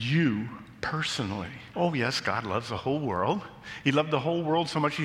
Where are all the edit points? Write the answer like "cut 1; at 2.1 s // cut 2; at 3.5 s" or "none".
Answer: cut 1; at 1.6 s